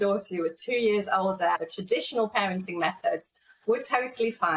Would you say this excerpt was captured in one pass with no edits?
no; 1 cut; at 1.6 s

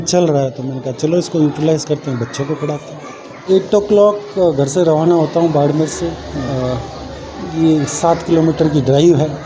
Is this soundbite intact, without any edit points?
no; 1 cut; at 3.3 s

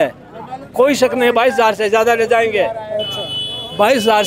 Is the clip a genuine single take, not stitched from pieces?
yes; 0 cuts

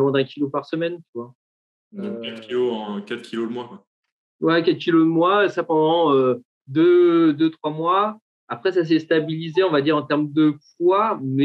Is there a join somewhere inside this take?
no; 0 cuts

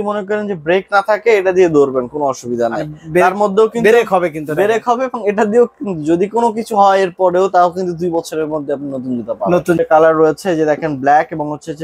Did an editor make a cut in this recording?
yes; 1 cut; at 9.8 s

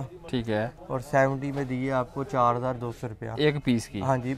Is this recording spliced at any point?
no; 0 cuts

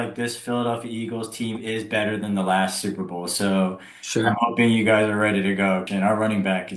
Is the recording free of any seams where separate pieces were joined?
no; 1 cut; at 5.9 s

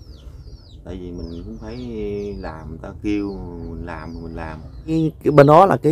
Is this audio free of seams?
no; 1 cut; at 5.0 s

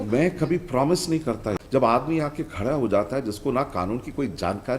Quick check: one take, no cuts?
no; 1 cut; at 1.5 s

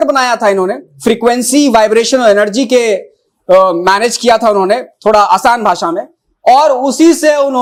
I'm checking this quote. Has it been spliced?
no; 0 cuts

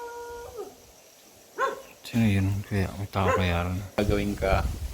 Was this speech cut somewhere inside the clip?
yes; 1 cut; at 4.0 s

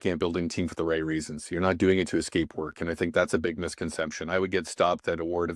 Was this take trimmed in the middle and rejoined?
no; 0 cuts

